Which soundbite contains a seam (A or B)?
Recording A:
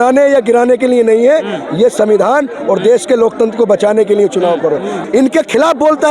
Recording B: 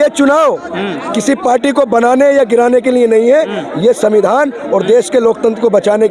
A